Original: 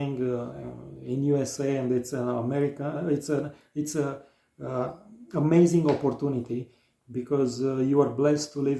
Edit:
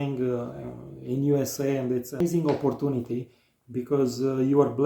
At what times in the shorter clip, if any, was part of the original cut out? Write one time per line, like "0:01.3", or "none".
0:02.2